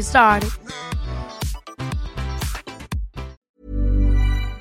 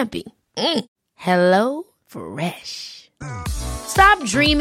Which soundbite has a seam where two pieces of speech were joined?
first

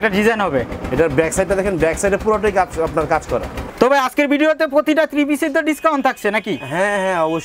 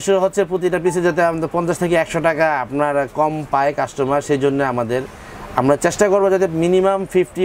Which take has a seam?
first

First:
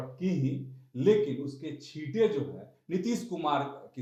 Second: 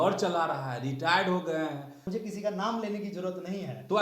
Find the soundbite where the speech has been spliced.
second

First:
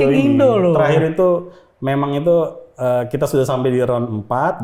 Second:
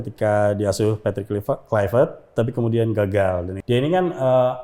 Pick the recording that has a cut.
second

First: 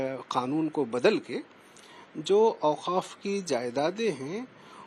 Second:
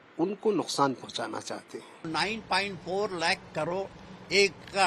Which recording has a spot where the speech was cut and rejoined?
second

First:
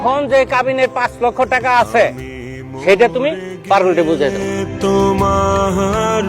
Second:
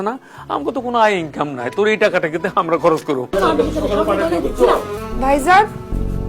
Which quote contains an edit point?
second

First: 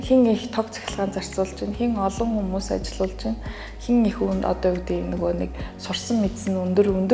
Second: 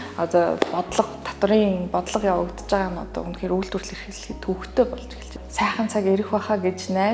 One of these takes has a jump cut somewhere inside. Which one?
second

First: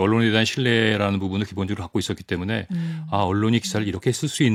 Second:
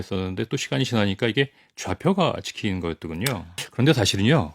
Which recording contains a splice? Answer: second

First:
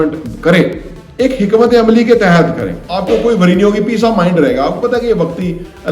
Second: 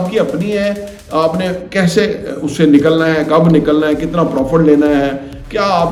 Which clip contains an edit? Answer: first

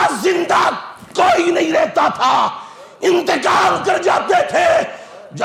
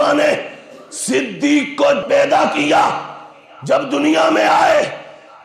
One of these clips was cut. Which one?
second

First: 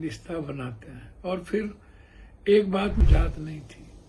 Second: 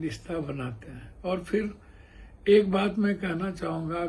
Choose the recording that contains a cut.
first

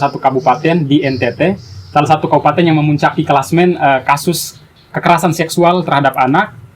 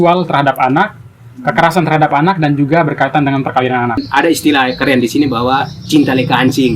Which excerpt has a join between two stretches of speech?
second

